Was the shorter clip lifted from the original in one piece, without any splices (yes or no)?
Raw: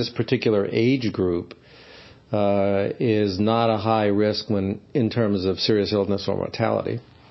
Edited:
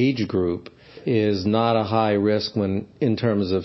no